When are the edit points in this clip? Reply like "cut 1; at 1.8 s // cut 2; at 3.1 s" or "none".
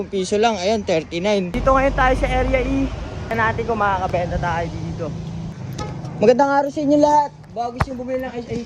cut 1; at 1.5 s // cut 2; at 3.3 s // cut 3; at 5.6 s